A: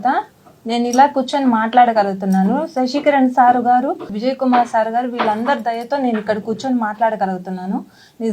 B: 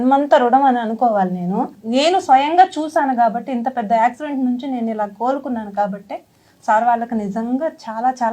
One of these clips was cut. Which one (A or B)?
B